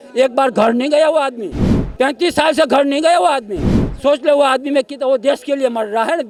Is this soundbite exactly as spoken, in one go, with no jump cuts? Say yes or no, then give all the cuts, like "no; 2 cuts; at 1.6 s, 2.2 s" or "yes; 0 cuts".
yes; 0 cuts